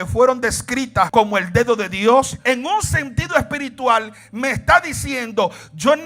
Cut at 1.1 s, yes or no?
yes